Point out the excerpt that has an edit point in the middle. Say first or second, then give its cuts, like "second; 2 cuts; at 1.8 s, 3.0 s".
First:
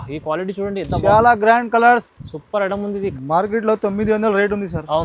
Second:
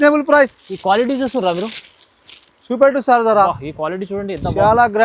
first; 1 cut; at 3.1 s